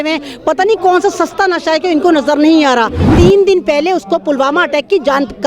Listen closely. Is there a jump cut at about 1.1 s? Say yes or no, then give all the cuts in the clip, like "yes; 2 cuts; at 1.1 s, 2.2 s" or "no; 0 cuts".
no; 1 cut; at 3.0 s